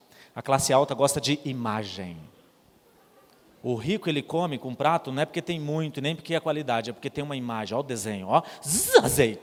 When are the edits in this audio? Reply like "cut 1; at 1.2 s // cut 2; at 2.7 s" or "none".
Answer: none